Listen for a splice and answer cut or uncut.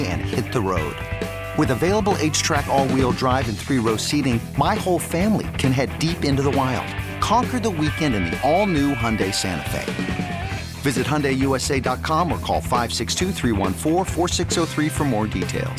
uncut